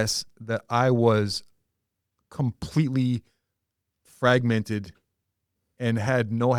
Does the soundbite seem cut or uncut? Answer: uncut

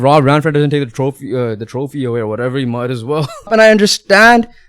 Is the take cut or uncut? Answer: cut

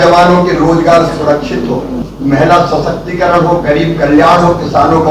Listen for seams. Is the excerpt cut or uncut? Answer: cut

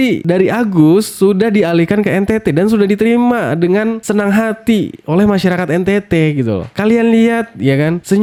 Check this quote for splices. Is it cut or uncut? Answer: uncut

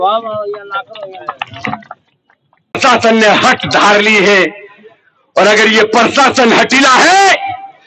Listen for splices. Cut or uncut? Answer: cut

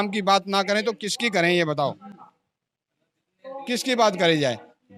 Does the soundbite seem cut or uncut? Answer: uncut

